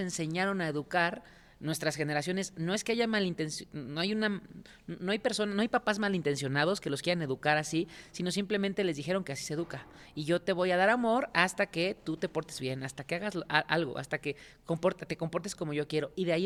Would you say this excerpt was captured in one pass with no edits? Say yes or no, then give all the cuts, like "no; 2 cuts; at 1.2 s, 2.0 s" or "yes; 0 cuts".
yes; 0 cuts